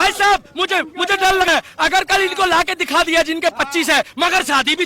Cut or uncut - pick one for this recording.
cut